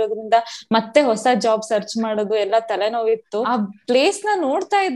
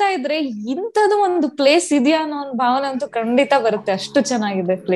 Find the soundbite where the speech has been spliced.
first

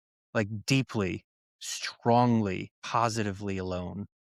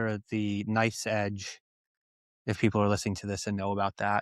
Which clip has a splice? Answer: first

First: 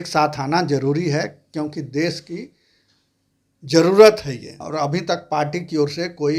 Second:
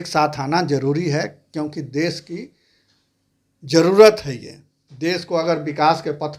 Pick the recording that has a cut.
first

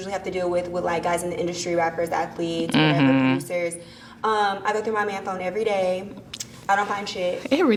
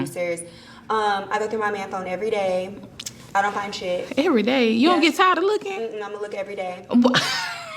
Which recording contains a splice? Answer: second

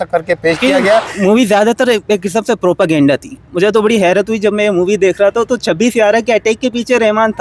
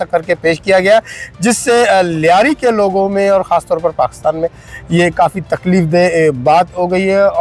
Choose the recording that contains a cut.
first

